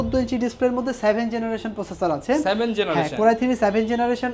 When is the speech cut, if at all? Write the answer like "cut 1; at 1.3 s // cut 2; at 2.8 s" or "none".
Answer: none